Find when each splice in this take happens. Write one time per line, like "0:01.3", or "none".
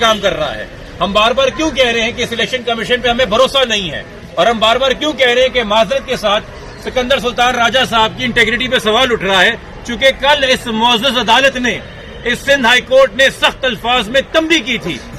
none